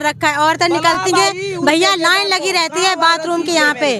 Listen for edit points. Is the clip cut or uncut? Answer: uncut